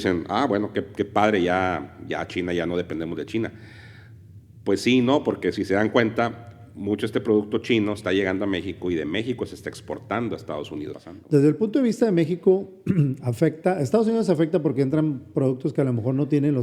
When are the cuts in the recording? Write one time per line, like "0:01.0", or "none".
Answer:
0:11.0